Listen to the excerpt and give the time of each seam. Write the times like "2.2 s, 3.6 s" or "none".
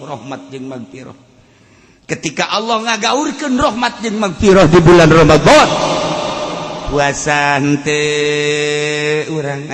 none